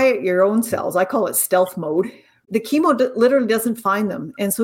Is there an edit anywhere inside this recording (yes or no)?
yes